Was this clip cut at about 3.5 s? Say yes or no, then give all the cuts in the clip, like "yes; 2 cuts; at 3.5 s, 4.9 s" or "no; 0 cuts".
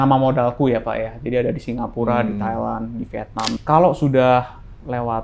yes; 1 cut; at 3.5 s